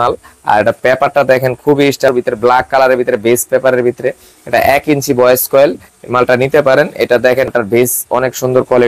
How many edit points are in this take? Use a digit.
2